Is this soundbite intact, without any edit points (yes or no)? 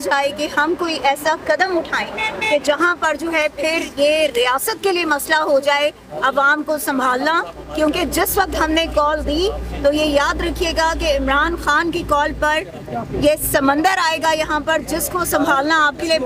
yes